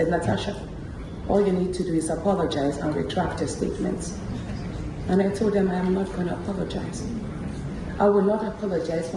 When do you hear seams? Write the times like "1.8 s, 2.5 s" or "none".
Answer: none